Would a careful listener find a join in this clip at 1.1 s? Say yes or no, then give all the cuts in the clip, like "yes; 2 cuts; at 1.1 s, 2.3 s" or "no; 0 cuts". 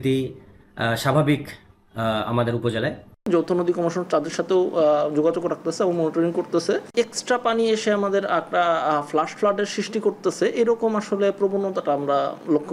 no; 2 cuts; at 3.2 s, 6.9 s